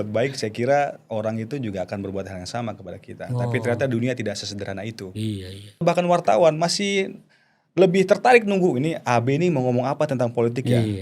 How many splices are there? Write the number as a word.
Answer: one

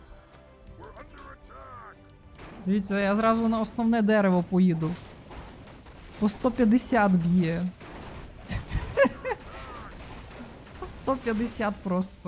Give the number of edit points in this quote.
one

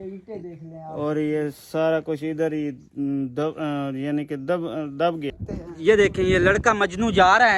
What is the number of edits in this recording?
one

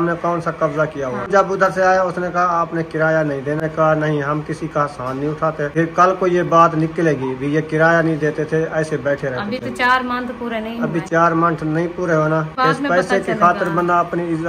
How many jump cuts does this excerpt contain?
four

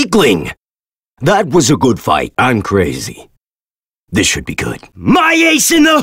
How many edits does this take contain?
one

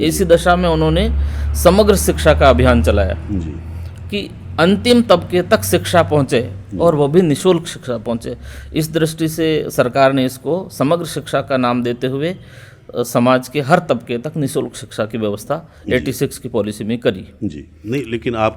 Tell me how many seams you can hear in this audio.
zero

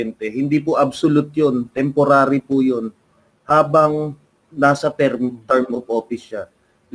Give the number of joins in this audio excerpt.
zero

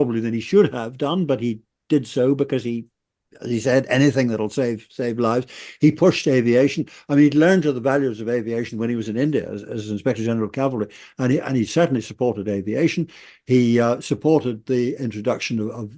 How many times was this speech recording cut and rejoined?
zero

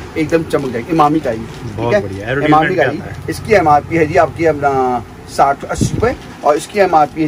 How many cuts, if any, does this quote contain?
zero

